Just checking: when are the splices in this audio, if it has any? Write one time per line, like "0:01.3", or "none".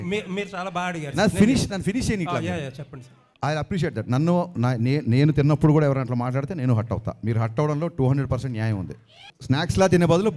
0:03.2
0:09.3